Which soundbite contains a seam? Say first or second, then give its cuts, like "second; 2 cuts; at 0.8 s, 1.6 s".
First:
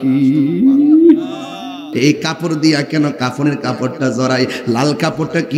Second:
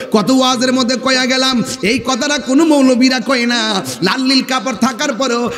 first; 1 cut; at 1.9 s